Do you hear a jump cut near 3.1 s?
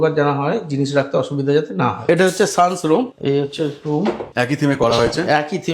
yes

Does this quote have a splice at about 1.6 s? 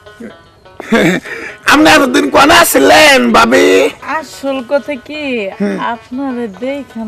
no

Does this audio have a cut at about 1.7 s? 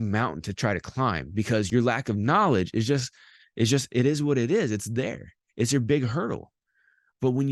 yes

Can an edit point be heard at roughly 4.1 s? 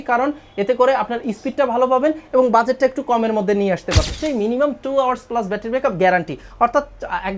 yes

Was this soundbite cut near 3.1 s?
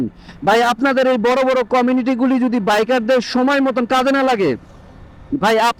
no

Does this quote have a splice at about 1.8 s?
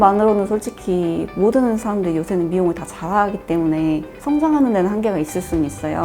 no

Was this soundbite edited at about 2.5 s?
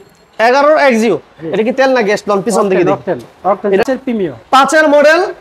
no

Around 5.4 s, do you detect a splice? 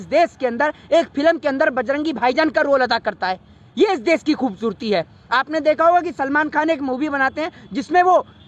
no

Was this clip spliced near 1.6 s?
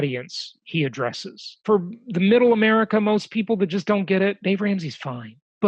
yes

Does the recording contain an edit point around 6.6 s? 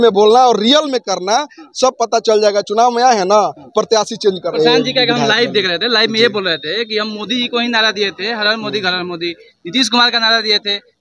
no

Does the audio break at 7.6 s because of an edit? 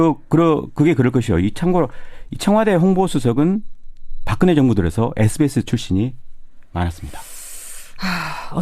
no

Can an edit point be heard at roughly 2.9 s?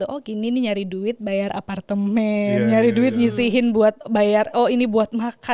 no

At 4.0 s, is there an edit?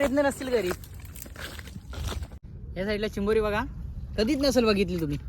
no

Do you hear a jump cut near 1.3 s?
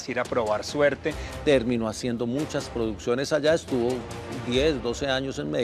yes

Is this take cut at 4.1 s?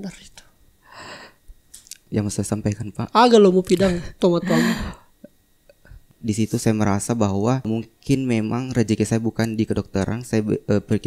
no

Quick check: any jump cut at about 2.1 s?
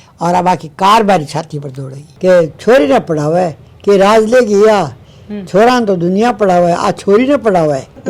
yes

